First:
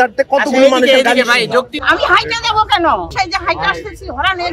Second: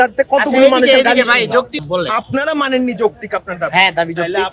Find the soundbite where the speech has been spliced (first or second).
first